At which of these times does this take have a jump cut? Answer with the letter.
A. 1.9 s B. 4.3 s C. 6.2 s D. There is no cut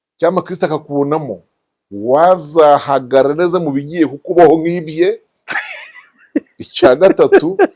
D